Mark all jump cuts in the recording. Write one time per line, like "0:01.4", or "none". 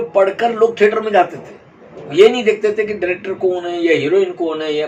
none